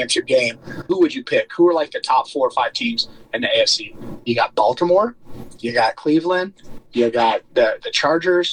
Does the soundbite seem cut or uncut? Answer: cut